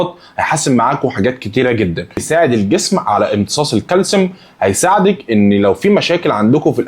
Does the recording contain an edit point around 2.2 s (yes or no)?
yes